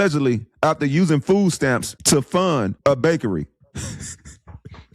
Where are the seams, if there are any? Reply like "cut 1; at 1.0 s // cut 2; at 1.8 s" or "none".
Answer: cut 1; at 1.9 s // cut 2; at 2.7 s